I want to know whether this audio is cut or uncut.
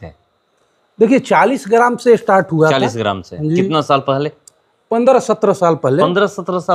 uncut